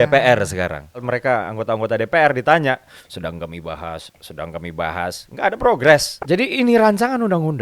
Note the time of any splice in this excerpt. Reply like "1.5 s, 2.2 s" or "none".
1.0 s, 6.1 s